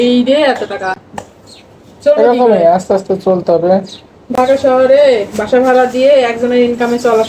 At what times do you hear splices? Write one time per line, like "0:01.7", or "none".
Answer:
none